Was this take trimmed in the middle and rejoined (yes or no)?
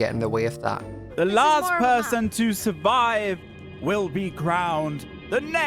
yes